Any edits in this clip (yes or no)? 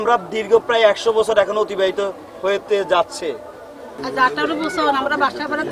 yes